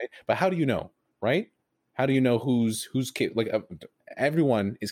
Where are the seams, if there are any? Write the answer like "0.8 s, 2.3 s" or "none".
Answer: 3.9 s